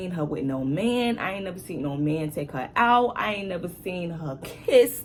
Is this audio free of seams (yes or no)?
yes